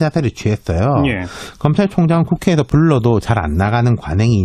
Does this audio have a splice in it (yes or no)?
no